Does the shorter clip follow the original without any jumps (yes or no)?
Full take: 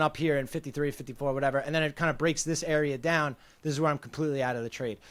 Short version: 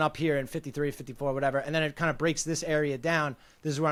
yes